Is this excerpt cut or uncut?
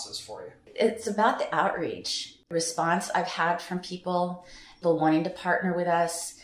cut